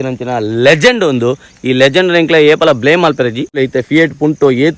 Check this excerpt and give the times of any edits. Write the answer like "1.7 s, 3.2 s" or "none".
3.6 s